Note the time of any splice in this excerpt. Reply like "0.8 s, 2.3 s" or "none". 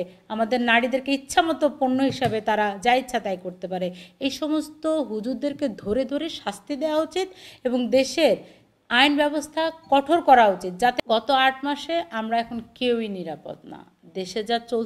11.0 s